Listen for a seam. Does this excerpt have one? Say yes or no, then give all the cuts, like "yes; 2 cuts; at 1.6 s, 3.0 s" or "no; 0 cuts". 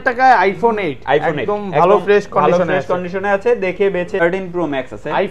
yes; 1 cut; at 4.2 s